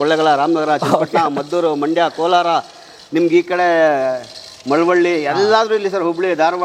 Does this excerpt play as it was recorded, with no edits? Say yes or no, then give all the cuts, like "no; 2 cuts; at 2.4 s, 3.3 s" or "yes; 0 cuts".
yes; 0 cuts